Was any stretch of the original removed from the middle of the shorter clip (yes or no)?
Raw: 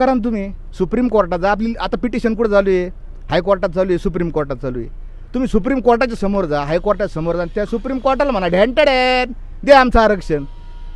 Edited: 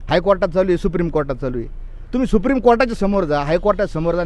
no